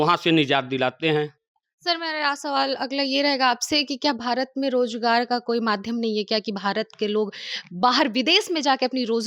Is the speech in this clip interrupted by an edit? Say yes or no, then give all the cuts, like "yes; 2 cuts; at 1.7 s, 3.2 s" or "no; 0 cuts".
no; 0 cuts